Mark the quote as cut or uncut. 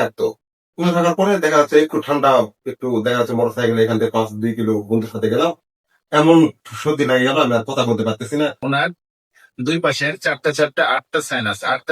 cut